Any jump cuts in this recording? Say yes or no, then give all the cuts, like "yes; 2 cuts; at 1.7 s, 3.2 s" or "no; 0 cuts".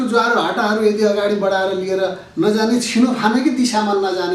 no; 0 cuts